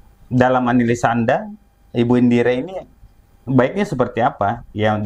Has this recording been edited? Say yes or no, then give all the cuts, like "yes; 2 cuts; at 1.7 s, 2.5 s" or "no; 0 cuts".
no; 0 cuts